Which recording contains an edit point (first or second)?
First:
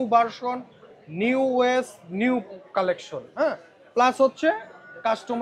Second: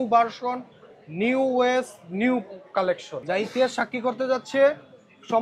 second